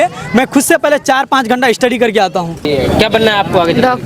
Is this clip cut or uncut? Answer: cut